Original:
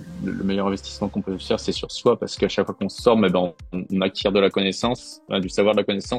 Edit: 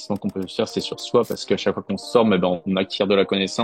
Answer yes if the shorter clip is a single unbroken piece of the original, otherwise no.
no